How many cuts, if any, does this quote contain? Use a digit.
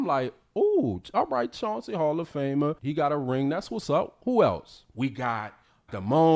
2